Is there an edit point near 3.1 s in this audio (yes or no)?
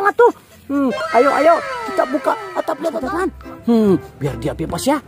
yes